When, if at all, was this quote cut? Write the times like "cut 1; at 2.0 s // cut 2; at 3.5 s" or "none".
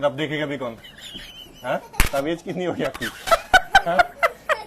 cut 1; at 0.9 s